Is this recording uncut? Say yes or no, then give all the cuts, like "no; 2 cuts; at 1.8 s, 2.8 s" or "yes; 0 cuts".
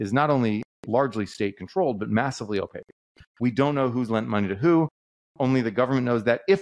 yes; 0 cuts